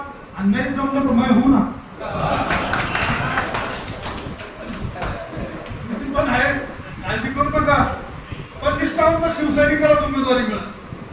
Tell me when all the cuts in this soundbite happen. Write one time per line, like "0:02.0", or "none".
none